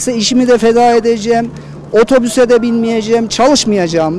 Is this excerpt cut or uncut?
uncut